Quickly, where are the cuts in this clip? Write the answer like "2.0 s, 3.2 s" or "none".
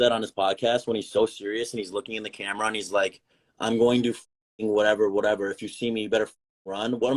none